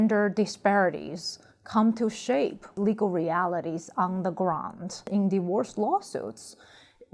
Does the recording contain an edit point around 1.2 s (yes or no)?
no